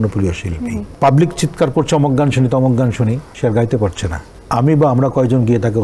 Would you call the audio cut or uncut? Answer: cut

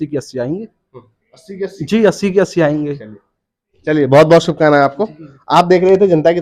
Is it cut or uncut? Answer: uncut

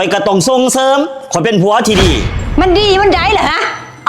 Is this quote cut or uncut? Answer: cut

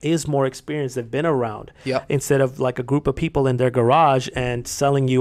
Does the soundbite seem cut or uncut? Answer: uncut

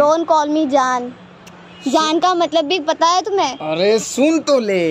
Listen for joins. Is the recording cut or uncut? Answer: uncut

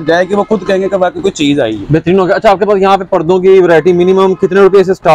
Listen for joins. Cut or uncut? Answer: uncut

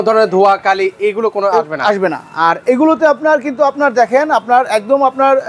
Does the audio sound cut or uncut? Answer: uncut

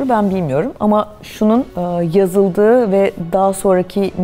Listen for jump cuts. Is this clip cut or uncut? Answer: uncut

